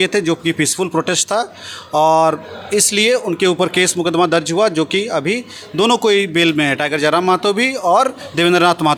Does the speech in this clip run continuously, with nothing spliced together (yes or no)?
yes